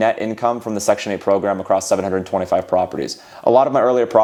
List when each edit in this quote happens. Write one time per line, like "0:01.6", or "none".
none